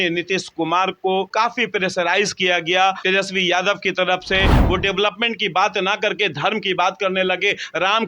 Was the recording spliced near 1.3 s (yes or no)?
yes